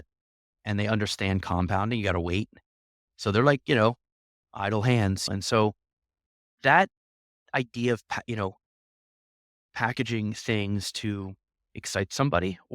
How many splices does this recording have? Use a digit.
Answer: 1